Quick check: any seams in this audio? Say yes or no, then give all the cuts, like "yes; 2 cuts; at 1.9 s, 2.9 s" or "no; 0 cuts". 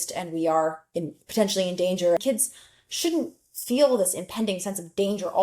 yes; 1 cut; at 2.2 s